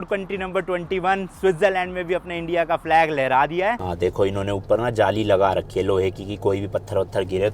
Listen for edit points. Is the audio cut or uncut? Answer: cut